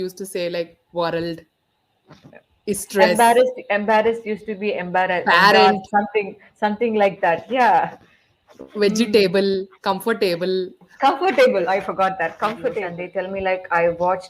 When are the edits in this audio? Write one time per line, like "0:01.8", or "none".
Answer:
0:13.0